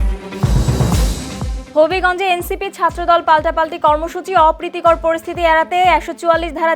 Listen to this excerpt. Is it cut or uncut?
cut